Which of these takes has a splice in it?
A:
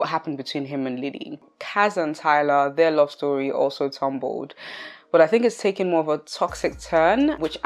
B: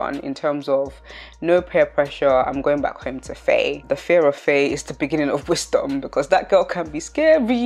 A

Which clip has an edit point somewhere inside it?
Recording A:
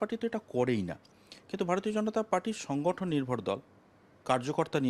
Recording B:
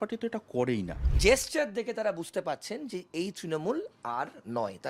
B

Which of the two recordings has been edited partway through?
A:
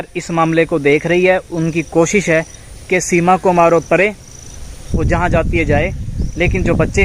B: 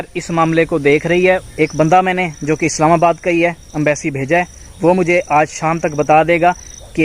B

